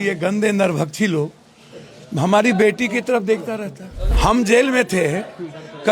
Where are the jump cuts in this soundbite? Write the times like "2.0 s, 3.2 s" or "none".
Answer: 4.0 s